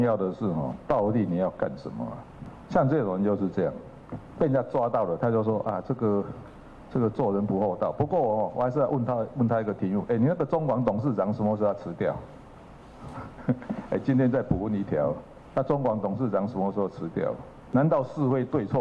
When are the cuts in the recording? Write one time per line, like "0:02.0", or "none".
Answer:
0:17.6